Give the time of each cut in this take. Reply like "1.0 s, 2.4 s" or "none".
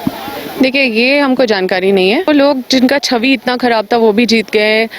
2.3 s